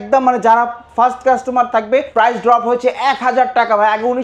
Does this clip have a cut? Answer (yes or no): yes